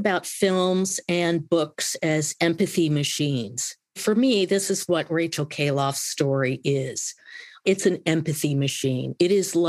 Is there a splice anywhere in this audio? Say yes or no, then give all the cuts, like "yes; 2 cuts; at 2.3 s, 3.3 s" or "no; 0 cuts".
no; 0 cuts